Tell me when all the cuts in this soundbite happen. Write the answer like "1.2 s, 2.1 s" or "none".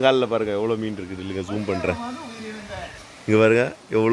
none